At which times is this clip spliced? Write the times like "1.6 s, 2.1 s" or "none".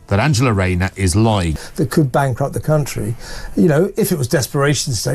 1.6 s